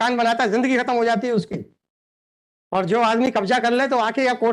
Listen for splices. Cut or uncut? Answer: uncut